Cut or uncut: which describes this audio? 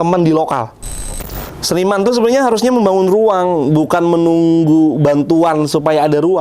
cut